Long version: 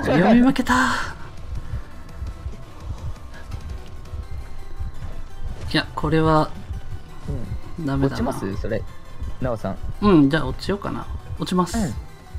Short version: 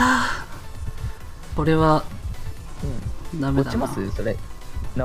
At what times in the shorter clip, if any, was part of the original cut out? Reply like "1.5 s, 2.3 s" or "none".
1.6 s